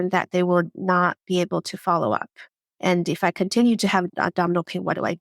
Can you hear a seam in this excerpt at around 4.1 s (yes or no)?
yes